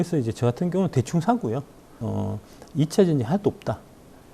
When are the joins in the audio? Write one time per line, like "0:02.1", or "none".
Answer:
0:02.0

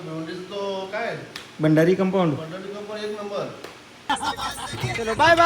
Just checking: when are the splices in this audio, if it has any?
0:04.1

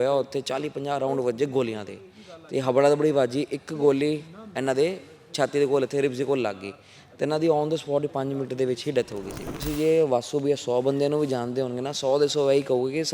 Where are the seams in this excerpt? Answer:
0:09.6

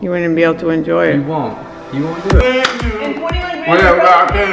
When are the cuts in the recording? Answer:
0:02.4

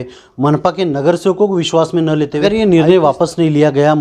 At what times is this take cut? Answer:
0:02.3

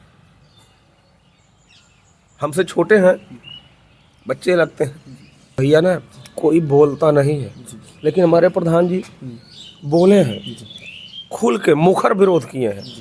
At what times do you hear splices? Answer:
0:05.6

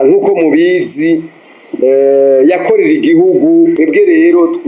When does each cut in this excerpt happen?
0:03.7

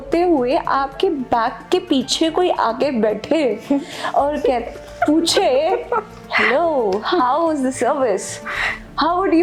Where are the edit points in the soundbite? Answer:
none

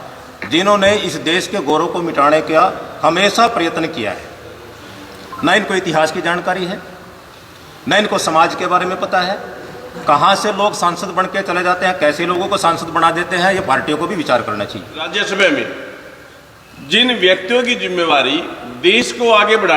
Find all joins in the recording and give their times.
0:15.3

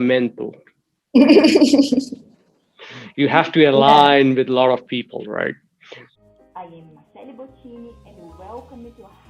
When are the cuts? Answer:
0:06.0

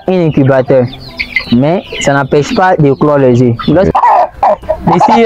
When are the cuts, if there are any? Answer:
0:03.9

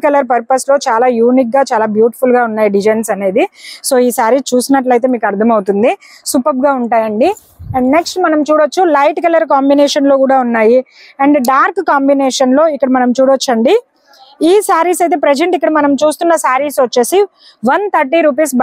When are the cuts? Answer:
none

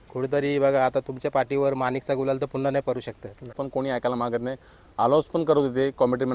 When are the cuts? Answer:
0:03.6

